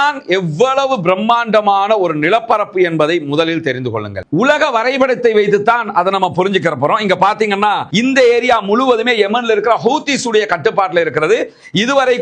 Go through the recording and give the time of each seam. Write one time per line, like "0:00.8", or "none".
0:07.9